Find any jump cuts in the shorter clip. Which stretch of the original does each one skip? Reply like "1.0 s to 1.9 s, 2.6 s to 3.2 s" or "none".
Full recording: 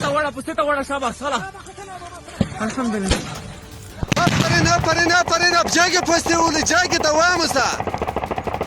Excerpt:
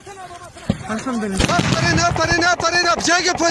3.2 s to 4.1 s